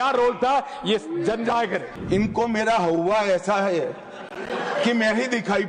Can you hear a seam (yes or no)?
yes